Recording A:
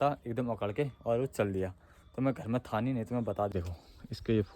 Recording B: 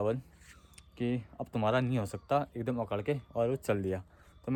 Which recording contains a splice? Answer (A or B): A